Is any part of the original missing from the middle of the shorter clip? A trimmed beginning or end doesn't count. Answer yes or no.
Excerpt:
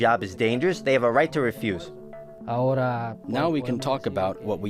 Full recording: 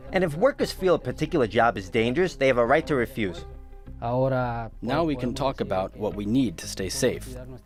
no